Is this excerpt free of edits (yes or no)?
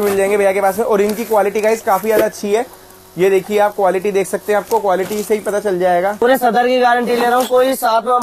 no